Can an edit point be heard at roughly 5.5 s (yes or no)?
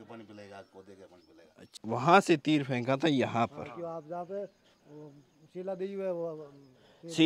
no